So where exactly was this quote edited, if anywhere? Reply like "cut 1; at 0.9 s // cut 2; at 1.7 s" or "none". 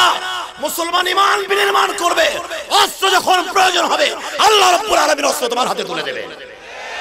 none